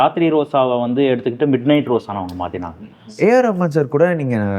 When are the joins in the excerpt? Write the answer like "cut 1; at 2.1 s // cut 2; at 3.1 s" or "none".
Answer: cut 1; at 3.0 s